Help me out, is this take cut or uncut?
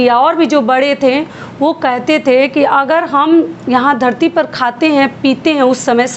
uncut